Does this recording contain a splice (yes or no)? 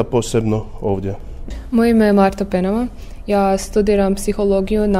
yes